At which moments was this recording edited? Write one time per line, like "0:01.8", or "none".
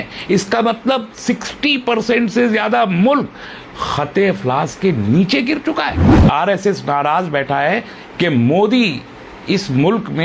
0:06.0